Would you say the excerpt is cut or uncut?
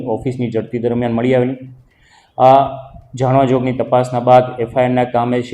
uncut